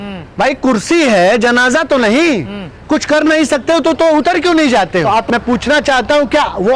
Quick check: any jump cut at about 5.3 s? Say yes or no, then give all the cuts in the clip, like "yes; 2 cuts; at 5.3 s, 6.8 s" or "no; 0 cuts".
yes; 1 cut; at 5.3 s